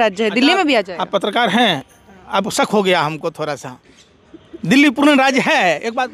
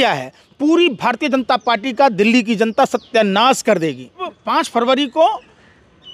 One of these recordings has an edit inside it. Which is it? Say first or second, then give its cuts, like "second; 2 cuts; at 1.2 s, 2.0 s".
second; 1 cut; at 4.4 s